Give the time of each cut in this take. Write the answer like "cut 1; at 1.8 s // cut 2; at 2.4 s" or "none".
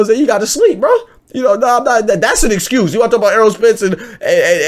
none